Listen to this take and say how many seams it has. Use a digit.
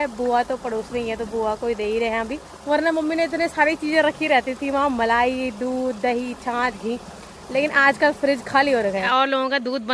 2